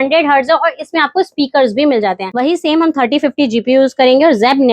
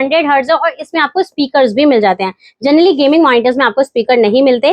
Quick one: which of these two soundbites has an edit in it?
first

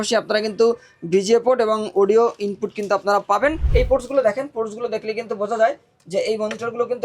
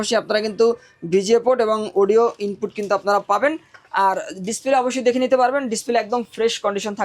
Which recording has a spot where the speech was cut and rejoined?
first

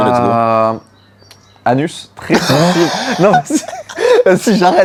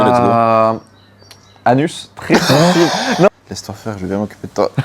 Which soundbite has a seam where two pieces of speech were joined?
second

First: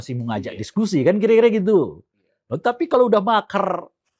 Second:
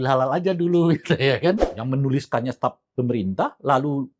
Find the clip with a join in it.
second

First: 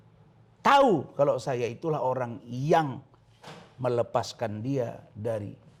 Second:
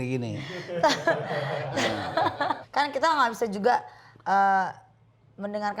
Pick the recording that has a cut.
second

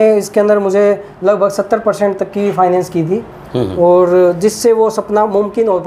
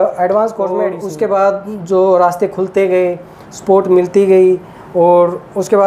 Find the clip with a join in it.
second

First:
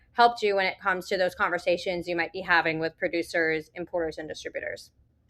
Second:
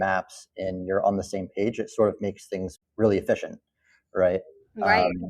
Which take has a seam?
second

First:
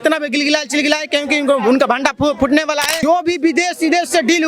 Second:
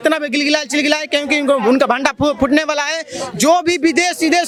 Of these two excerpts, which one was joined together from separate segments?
first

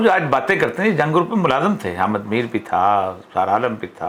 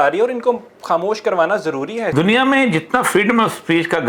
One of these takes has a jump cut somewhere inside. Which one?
second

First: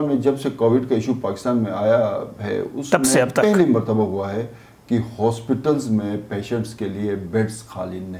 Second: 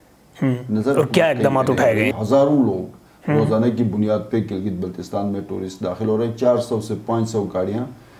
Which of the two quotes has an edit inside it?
second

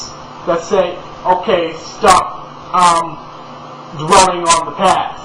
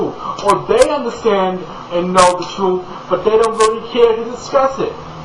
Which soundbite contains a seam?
first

